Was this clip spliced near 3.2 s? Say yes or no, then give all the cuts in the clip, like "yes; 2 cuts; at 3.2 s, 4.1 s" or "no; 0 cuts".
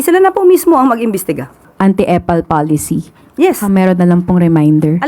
no; 1 cut; at 1.6 s